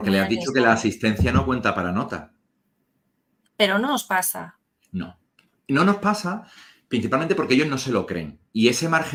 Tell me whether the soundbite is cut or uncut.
uncut